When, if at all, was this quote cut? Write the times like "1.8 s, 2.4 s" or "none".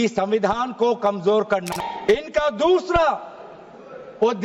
1.7 s